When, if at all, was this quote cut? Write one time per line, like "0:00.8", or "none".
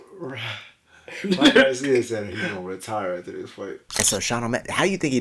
0:04.0